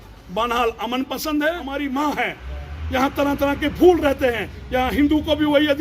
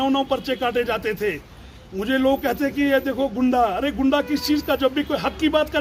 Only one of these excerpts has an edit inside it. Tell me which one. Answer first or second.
first